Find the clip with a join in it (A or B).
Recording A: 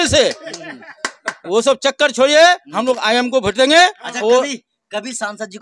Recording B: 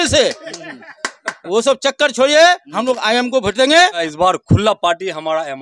B